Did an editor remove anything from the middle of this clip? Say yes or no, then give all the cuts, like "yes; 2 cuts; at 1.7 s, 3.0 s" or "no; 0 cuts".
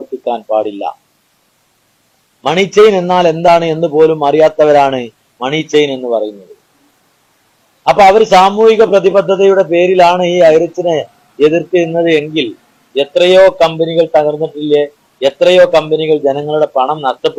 no; 0 cuts